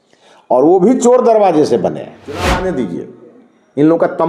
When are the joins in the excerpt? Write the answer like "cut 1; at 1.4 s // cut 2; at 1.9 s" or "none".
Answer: cut 1; at 2.4 s